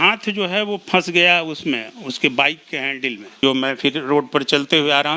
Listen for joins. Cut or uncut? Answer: cut